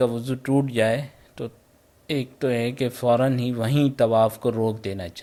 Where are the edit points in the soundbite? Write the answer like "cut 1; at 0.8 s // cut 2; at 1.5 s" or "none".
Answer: none